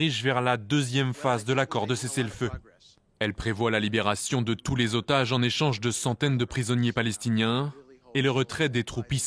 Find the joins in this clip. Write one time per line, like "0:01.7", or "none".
0:03.6